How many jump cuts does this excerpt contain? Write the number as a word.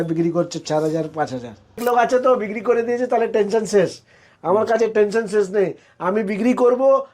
one